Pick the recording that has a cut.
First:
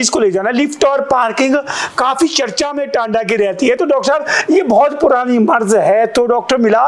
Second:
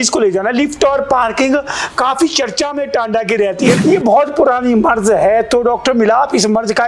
second; 1 cut; at 3.8 s

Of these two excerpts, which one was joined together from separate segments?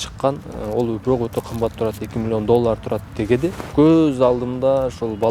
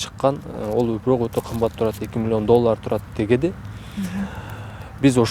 first; 1 cut; at 3.7 s

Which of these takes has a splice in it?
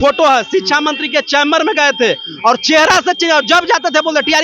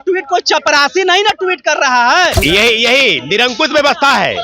second; 1 cut; at 2.4 s

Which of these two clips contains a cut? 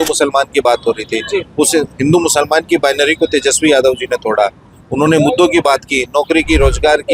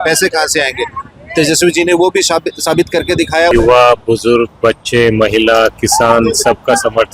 second; 1 cut; at 3.5 s

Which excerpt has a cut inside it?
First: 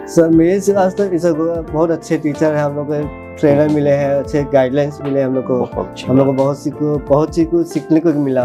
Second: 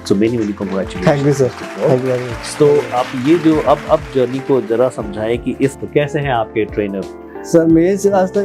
second; 1 cut; at 5.8 s

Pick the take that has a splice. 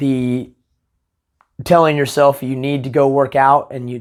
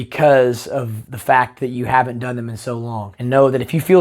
second; 1 cut; at 3.1 s

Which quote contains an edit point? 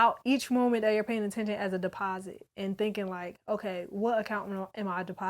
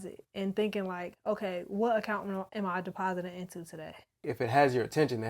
second; 1 cut; at 4.2 s

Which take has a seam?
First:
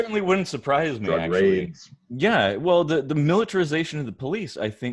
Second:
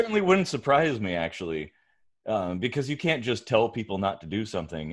first; 1 cut; at 1.0 s

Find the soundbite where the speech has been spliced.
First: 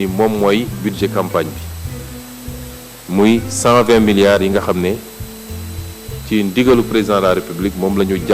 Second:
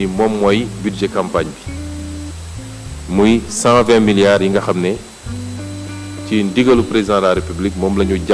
second; 2 cuts; at 1.6 s, 2.8 s

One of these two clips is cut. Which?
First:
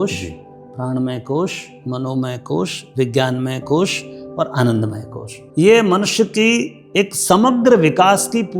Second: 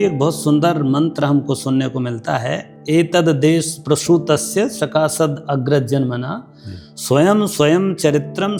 first; 1 cut; at 5.4 s

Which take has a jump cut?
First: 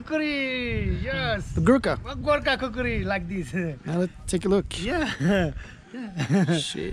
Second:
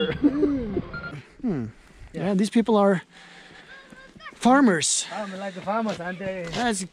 second; 1 cut; at 1.3 s

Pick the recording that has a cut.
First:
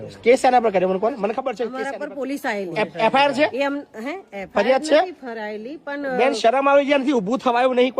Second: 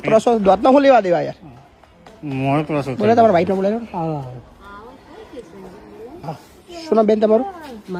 first; 1 cut; at 1.8 s

